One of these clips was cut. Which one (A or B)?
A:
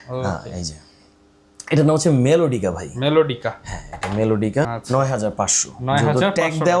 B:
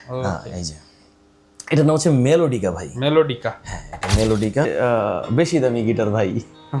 B